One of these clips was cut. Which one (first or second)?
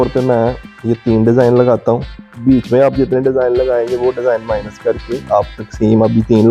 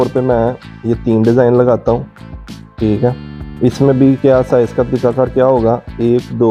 first